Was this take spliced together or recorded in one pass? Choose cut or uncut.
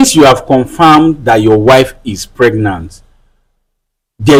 uncut